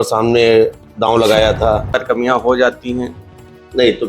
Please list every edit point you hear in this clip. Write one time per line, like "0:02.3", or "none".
0:02.0